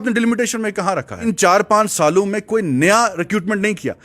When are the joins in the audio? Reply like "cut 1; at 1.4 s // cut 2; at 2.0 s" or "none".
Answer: cut 1; at 1.2 s